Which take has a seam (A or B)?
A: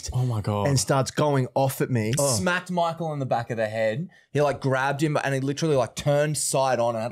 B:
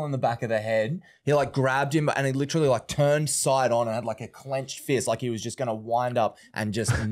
A